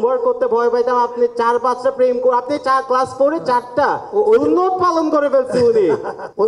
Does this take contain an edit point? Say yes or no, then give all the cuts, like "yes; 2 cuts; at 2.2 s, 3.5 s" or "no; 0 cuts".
no; 0 cuts